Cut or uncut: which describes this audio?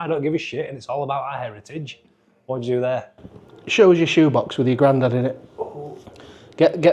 uncut